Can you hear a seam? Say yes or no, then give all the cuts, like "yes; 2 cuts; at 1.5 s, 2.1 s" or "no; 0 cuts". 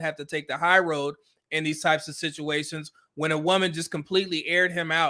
no; 0 cuts